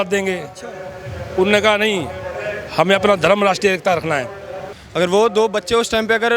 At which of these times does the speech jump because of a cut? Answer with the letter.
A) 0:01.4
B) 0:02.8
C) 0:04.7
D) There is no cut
C